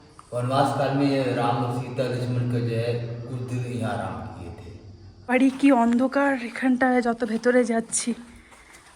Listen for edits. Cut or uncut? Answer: cut